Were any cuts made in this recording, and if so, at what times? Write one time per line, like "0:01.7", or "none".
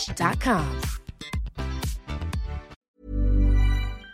0:03.0